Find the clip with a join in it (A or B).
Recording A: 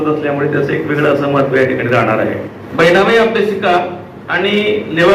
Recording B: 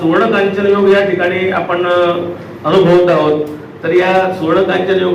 A